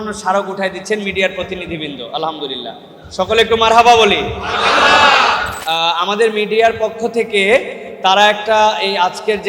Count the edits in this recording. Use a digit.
1